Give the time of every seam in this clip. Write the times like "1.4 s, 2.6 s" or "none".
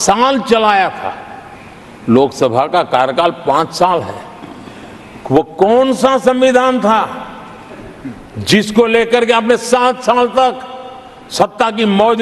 none